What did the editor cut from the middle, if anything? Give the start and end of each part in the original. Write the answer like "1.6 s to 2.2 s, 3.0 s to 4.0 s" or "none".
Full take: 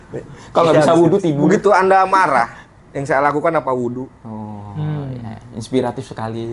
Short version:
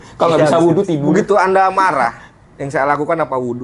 none